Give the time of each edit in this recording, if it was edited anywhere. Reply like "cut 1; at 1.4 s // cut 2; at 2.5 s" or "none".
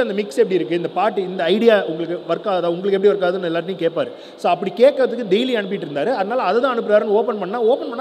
none